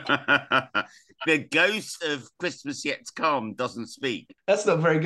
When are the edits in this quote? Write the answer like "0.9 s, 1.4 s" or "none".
none

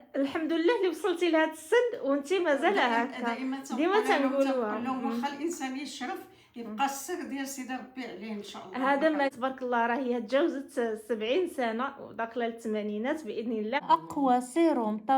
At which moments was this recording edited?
9.3 s, 13.8 s

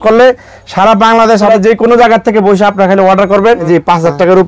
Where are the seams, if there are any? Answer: 1.5 s, 3.6 s

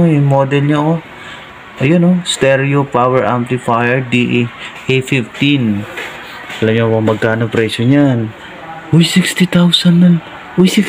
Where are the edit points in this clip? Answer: none

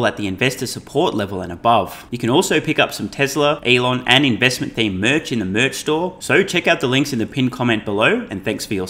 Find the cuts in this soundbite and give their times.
2.1 s, 3.6 s, 6.2 s

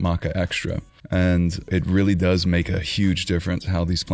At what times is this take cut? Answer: 0.9 s, 1.7 s

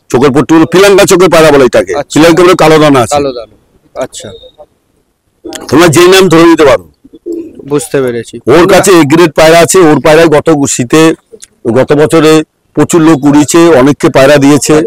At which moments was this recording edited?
none

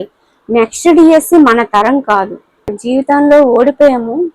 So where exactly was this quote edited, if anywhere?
2.8 s

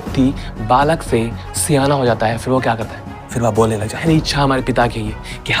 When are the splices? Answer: 4.0 s

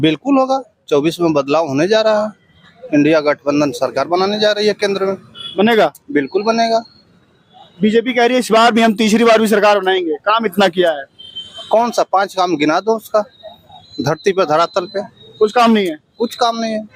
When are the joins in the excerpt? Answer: none

